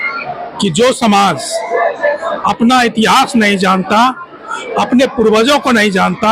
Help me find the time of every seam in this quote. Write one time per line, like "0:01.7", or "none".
none